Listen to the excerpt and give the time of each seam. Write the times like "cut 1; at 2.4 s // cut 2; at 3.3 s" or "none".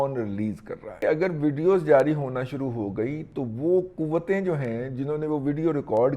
cut 1; at 1.0 s